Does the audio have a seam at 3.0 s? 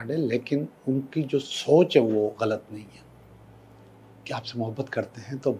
no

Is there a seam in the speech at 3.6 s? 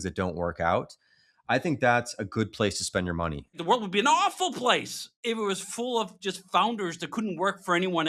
yes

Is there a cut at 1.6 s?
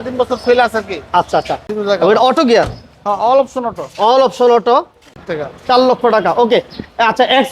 yes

